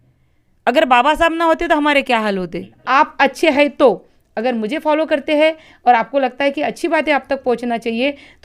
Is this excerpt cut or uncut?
cut